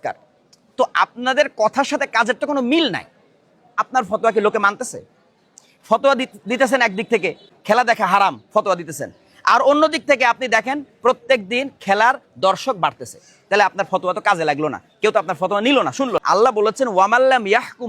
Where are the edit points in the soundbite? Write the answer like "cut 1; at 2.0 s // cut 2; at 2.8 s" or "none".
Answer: cut 1; at 3.7 s // cut 2; at 7.5 s // cut 3; at 16.2 s